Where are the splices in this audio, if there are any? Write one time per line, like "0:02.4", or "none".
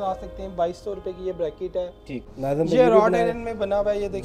0:02.2